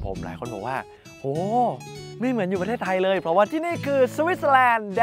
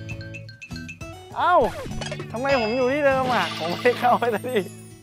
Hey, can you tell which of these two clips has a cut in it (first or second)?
first